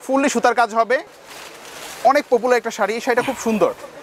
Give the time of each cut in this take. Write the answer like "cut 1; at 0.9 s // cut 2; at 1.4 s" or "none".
cut 1; at 1.1 s